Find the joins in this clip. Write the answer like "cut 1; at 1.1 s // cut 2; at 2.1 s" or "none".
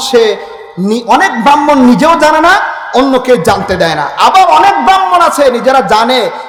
none